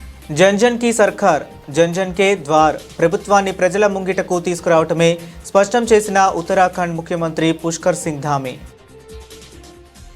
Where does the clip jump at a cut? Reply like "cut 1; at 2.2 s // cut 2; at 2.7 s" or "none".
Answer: cut 1; at 8.8 s